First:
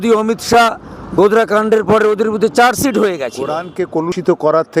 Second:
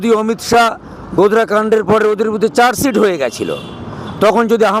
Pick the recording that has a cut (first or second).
first